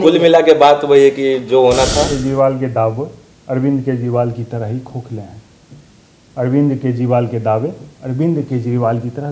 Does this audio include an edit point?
yes; 1 cut; at 2.2 s

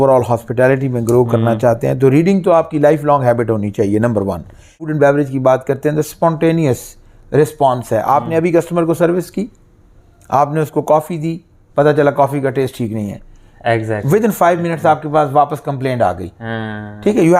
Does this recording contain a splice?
yes; 1 cut; at 4.8 s

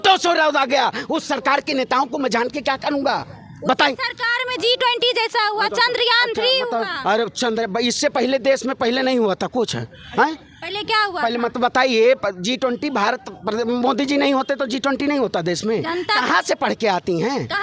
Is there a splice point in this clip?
no; 0 cuts

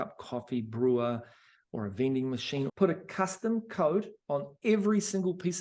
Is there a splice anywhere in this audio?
yes; 1 cut; at 2.7 s

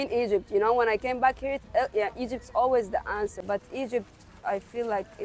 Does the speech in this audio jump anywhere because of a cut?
yes; 1 cut; at 3.4 s

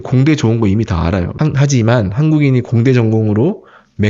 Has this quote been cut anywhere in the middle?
yes; 1 cut; at 1.3 s

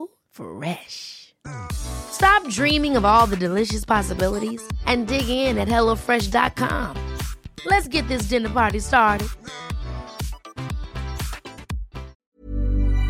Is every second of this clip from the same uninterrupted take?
no; 1 cut; at 12.1 s

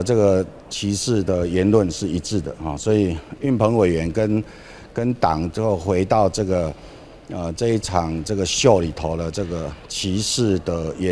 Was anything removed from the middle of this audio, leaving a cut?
no; 0 cuts

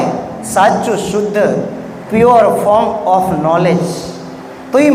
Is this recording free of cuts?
yes; 0 cuts

